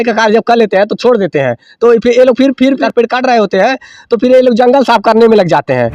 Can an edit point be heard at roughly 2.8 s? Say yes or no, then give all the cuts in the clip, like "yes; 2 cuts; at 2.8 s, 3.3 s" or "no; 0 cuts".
yes; 1 cut; at 2.8 s